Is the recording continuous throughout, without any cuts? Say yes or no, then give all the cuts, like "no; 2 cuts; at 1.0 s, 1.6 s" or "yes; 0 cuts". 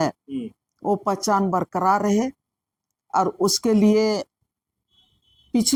yes; 0 cuts